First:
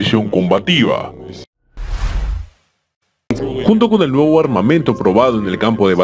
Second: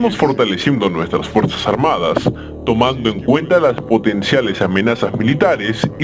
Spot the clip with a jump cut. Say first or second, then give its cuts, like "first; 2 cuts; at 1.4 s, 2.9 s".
first; 1 cut; at 3.2 s